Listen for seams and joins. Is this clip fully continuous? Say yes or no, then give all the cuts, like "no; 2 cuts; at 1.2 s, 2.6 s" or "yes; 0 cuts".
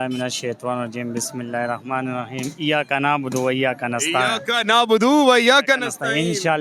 yes; 0 cuts